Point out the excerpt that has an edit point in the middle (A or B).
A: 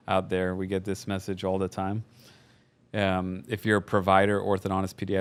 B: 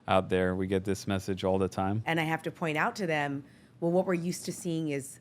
B